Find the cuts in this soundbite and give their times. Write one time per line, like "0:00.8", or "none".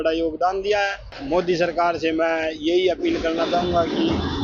0:01.1